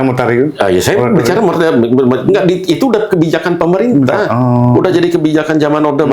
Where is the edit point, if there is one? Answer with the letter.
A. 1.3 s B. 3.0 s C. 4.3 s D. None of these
D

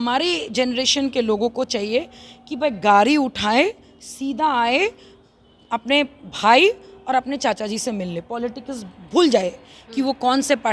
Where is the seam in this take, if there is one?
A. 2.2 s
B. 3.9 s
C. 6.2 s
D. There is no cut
D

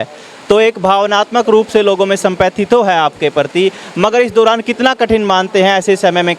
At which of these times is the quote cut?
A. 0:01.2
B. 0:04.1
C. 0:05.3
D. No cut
D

